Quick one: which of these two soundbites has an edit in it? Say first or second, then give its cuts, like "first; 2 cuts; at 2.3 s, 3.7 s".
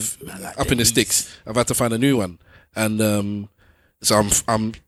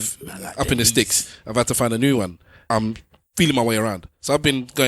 second; 1 cut; at 2.6 s